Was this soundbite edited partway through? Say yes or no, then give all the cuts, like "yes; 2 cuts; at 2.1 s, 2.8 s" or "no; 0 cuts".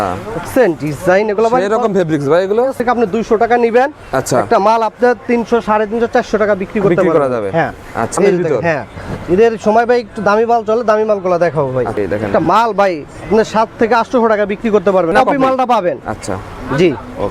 yes; 4 cuts; at 2.8 s, 8.2 s, 12.0 s, 15.1 s